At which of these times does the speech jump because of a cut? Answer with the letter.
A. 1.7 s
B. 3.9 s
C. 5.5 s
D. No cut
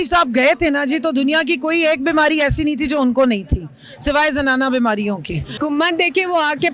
C